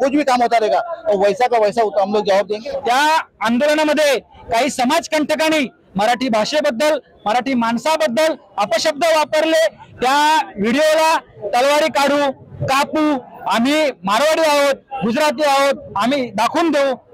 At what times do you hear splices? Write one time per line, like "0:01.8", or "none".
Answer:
0:02.6